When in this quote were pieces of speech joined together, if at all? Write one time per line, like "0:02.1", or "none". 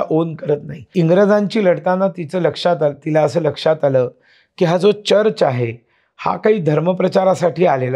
0:00.9